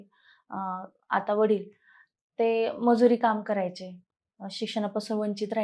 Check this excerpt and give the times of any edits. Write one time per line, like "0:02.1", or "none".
none